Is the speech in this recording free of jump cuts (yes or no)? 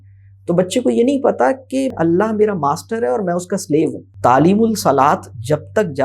no